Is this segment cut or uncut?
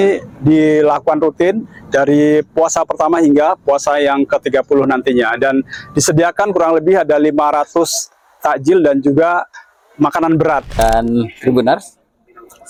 uncut